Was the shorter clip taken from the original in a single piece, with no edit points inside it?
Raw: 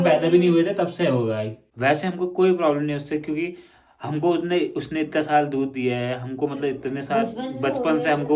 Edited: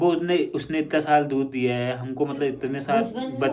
yes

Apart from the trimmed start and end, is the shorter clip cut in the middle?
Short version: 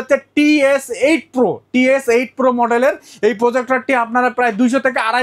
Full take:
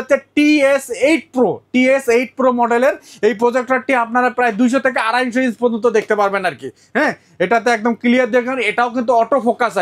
no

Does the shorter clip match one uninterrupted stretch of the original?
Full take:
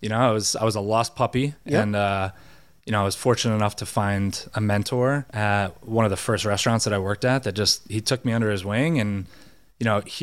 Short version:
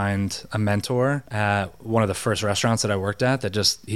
yes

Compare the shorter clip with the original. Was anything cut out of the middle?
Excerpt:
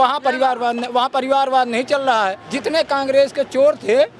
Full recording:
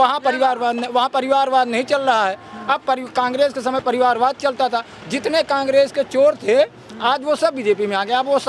yes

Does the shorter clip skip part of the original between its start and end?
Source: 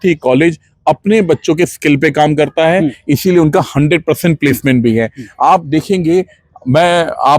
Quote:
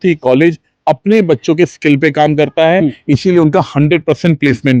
no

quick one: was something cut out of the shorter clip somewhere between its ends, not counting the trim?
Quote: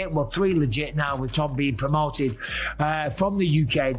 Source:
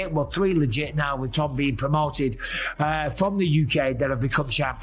no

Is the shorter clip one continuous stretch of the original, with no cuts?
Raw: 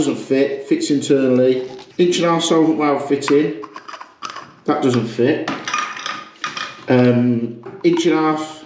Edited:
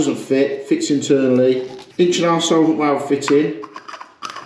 yes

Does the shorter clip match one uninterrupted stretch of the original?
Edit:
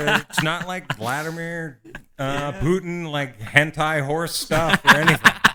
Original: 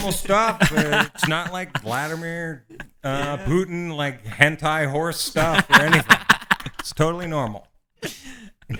yes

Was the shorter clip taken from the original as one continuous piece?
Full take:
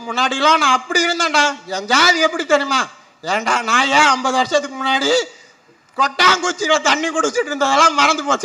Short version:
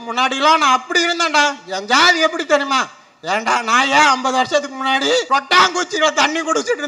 no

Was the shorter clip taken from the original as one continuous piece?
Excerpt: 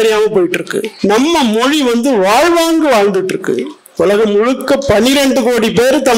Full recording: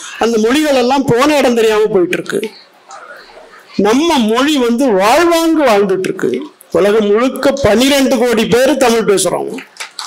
no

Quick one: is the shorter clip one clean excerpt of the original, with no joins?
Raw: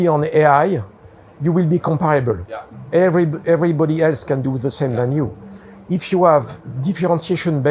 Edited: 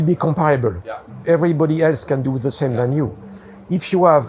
no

